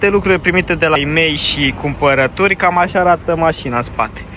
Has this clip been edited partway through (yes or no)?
yes